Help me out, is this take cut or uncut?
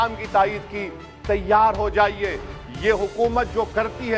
uncut